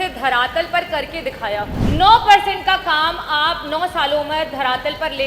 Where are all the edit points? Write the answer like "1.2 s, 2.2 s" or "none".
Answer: 1.8 s